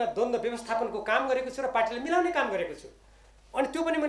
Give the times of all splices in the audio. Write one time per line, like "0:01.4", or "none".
none